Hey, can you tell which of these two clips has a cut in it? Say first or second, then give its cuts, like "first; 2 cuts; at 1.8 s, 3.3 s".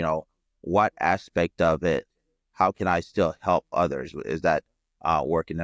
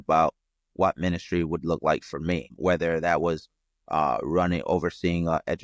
second; 1 cut; at 2.5 s